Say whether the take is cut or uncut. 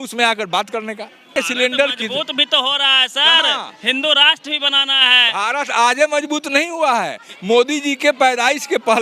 cut